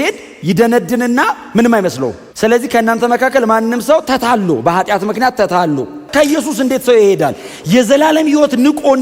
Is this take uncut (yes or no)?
no